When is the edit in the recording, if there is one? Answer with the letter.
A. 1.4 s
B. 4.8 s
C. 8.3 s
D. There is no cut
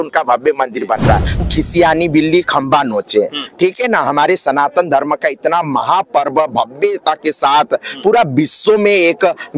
A